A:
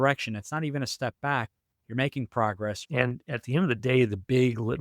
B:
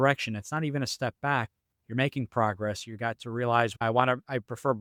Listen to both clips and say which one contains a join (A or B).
A